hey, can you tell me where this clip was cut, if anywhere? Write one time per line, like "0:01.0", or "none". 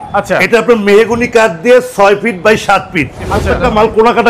0:03.4